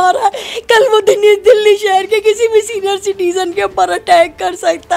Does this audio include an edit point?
no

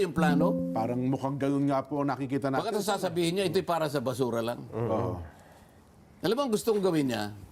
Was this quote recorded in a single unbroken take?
yes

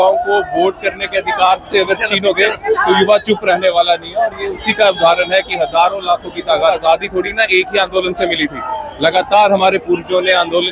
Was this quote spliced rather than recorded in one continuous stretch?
yes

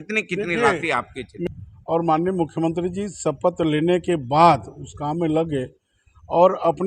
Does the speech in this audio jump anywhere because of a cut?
yes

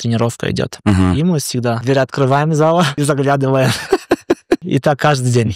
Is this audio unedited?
no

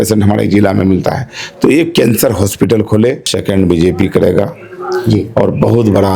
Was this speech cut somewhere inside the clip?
yes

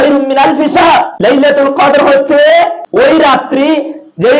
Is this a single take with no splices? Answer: no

